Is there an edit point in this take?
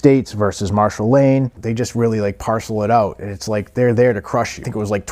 yes; 1 cut; at 1.6 s

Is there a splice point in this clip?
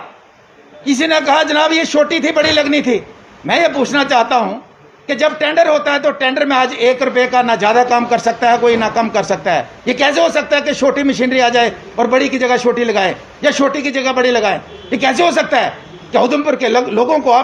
no; 0 cuts

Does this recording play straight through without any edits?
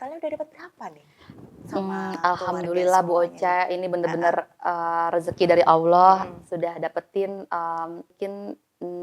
no; 1 cut; at 8.1 s

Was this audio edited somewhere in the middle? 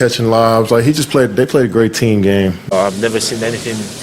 yes; 1 cut; at 2.7 s

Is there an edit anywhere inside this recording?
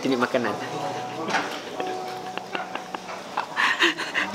no; 0 cuts

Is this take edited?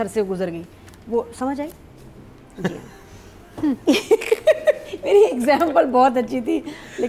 no; 0 cuts

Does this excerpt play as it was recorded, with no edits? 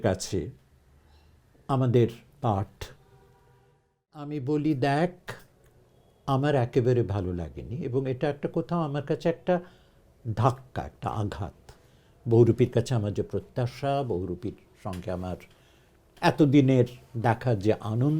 no; 1 cut; at 4.1 s

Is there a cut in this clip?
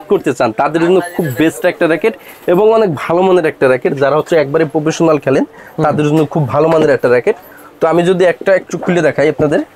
no; 0 cuts

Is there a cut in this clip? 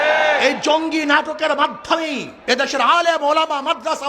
no; 0 cuts

